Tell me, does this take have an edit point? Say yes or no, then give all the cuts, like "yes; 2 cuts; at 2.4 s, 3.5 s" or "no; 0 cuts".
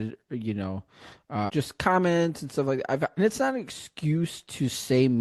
yes; 2 cuts; at 1.5 s, 3.2 s